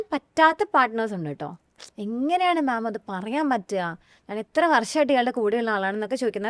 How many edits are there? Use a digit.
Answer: 0